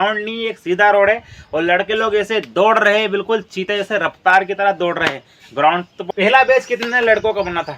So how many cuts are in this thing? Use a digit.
1